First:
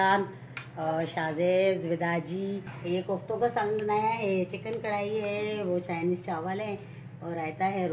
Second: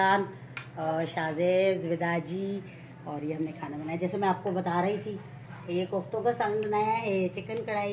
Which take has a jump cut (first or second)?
first